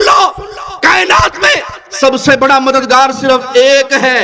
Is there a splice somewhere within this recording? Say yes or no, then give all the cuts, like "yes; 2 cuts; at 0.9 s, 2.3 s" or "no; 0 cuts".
no; 0 cuts